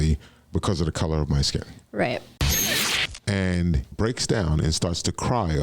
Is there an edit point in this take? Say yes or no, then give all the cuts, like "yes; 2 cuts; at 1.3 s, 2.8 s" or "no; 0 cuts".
yes; 2 cuts; at 2.7 s, 3.9 s